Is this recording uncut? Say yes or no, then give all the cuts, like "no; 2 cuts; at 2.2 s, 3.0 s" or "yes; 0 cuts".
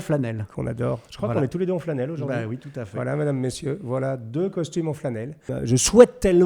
no; 1 cut; at 5.5 s